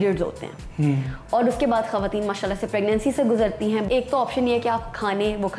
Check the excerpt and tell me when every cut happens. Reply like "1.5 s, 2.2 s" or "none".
3.8 s